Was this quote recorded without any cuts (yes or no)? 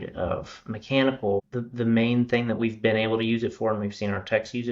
no